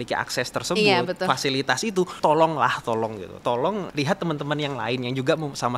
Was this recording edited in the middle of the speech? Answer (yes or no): yes